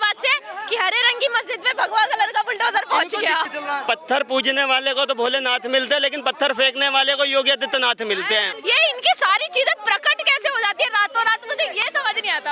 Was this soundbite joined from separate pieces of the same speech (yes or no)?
yes